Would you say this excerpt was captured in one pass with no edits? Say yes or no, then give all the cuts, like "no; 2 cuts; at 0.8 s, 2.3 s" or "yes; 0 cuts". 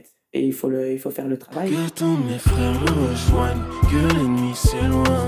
no; 1 cut; at 1.7 s